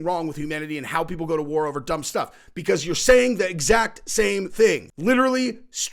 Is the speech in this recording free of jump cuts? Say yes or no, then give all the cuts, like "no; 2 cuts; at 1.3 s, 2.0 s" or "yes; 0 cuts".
no; 1 cut; at 4.9 s